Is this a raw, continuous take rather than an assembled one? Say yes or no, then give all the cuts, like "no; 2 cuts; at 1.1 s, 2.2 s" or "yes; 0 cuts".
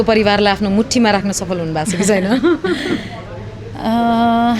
yes; 0 cuts